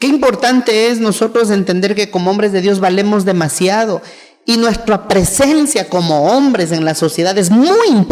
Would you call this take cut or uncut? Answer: uncut